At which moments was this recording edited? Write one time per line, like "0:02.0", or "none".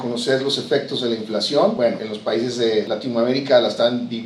0:01.8
0:02.9